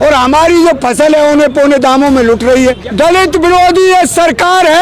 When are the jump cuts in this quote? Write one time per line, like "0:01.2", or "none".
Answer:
0:02.8